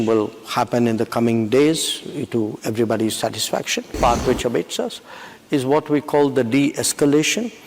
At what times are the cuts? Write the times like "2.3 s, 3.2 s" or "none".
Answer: 4.0 s